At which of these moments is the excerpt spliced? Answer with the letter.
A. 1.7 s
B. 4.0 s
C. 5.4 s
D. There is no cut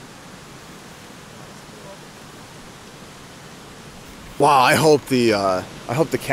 D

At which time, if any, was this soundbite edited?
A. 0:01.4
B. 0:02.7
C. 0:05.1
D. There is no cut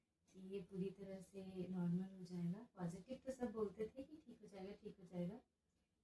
D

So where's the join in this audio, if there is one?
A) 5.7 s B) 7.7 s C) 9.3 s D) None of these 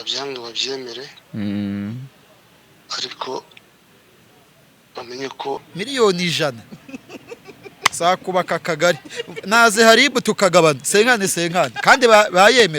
A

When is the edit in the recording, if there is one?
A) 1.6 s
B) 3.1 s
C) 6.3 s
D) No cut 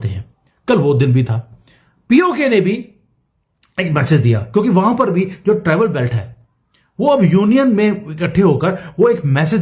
D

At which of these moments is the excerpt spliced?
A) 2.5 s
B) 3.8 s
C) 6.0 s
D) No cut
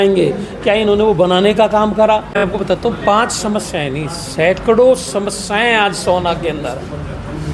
A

